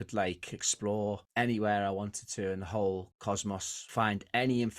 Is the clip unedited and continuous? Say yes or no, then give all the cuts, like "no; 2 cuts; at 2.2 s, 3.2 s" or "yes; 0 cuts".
no; 1 cut; at 3.8 s